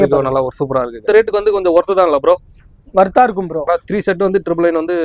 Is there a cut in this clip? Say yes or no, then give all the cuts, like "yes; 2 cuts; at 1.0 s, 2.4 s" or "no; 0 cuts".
yes; 2 cuts; at 1.0 s, 3.7 s